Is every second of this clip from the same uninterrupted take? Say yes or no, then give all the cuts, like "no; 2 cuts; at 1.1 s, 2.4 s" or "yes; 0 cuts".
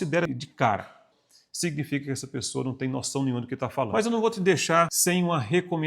no; 3 cuts; at 1.0 s, 3.9 s, 4.9 s